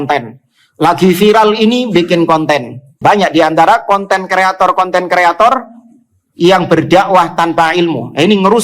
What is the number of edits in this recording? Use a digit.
1